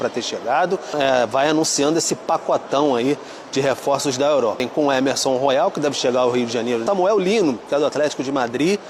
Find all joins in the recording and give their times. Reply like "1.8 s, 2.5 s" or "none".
0.9 s, 4.6 s, 6.8 s